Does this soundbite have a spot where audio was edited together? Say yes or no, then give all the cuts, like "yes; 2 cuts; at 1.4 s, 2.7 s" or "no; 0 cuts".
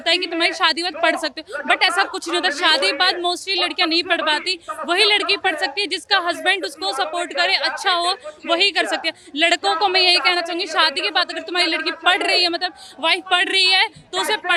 no; 0 cuts